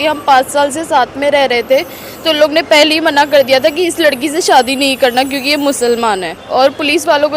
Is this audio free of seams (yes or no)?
no